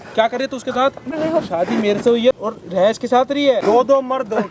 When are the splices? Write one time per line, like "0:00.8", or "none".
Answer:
0:01.1
0:02.3
0:03.6